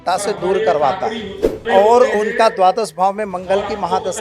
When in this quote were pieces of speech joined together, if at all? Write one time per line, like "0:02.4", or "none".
0:01.6

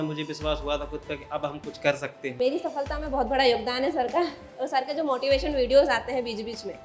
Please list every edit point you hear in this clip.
0:02.3

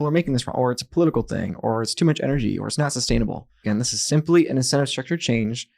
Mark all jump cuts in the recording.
0:03.6

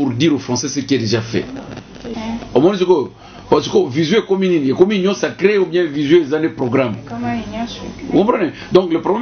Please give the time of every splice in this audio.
0:02.1

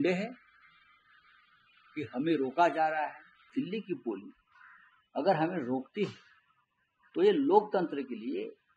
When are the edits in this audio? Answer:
0:03.5

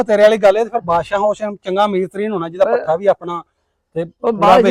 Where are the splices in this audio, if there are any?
none

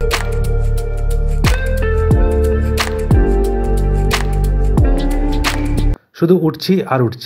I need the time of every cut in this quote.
0:05.9

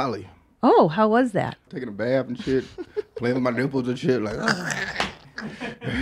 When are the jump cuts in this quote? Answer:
0:01.7

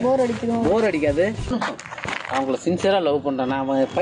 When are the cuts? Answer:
0:01.5

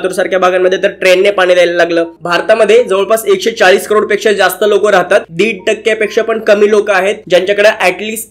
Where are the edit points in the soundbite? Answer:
0:02.1
0:05.3

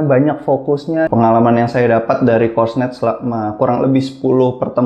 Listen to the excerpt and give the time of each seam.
0:01.1

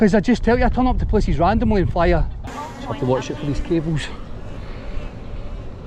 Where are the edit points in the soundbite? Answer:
0:02.5

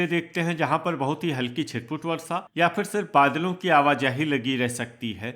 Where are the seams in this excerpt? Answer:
none

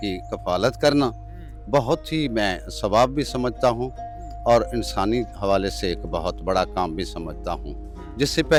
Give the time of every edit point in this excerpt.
none

